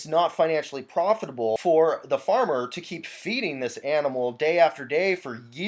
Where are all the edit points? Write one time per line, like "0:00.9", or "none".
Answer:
0:01.6